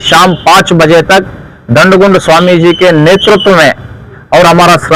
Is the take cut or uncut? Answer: uncut